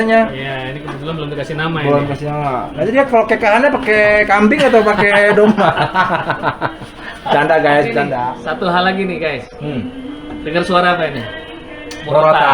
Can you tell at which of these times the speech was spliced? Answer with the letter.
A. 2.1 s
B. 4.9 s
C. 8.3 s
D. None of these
C